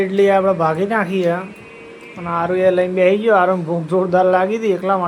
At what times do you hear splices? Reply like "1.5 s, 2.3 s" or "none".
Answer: none